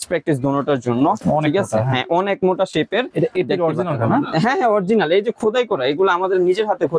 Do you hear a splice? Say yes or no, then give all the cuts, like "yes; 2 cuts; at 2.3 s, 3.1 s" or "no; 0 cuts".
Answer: yes; 1 cut; at 1.2 s